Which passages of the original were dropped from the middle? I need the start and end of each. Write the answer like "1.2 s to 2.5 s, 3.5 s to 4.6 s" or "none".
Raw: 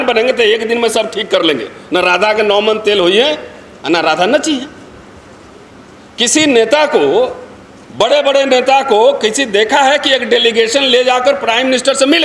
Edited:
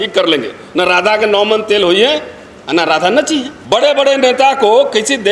4.7 s to 7.8 s